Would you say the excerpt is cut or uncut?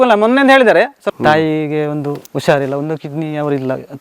cut